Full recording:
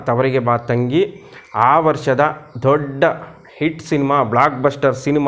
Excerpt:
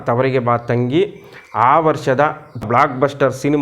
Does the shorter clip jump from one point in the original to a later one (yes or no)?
yes